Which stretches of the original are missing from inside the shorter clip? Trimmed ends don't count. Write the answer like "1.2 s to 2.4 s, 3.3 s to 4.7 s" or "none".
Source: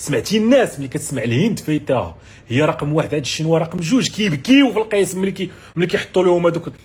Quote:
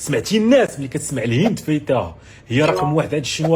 none